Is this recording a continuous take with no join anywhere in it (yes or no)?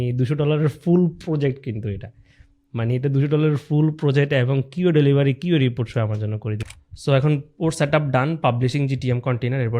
no